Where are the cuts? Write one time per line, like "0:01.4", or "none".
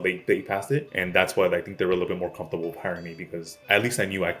0:01.0
0:03.5

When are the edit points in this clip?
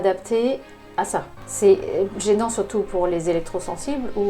0:01.4

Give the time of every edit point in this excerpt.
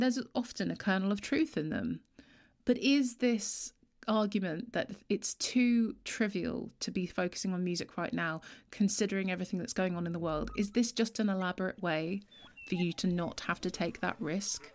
none

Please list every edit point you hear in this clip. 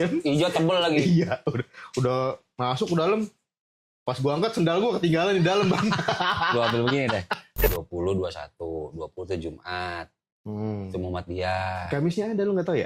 0:07.7

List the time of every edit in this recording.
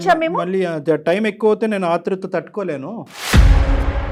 none

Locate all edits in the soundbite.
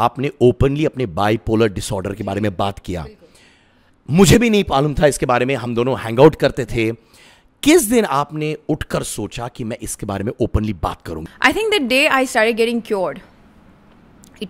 none

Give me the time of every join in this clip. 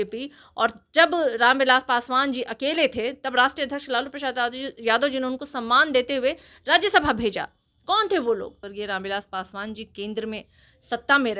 0:08.6

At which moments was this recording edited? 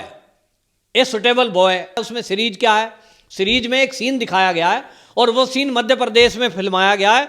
0:02.0

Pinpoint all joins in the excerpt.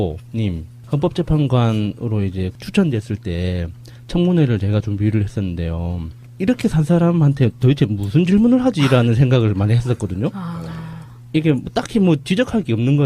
0:02.2

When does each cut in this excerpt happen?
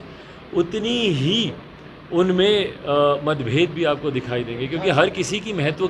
none

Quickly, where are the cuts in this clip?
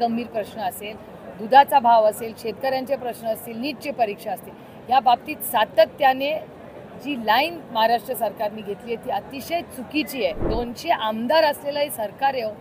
0:10.4

